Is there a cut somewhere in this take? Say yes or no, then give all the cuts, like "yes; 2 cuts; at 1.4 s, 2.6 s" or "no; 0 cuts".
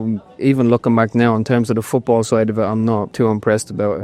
yes; 1 cut; at 3.1 s